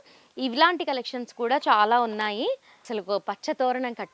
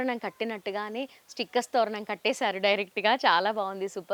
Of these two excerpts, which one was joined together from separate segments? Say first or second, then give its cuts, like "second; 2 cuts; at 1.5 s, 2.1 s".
first; 1 cut; at 2.7 s